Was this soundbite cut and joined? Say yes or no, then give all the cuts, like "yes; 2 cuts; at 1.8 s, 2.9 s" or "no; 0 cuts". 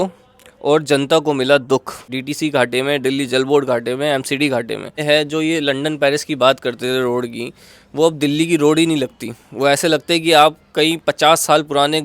yes; 2 cuts; at 2.2 s, 5.0 s